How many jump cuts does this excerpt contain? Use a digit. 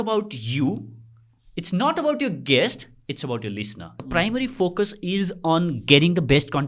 1